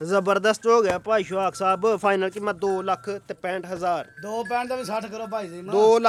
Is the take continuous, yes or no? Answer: yes